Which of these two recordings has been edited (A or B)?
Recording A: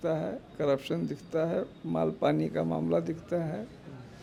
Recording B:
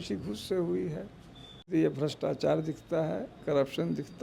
B